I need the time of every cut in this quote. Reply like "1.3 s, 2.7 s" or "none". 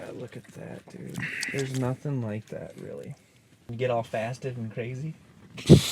3.7 s